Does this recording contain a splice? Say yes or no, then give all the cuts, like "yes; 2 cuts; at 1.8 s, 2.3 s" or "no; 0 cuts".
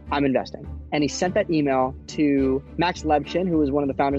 yes; 1 cut; at 2.7 s